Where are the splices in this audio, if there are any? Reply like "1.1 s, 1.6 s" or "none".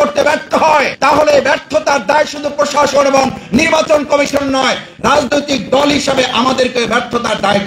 none